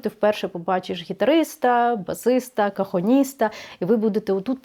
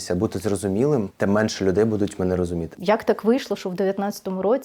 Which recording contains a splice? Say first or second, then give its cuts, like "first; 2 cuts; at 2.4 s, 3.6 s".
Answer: second; 2 cuts; at 1.1 s, 2.7 s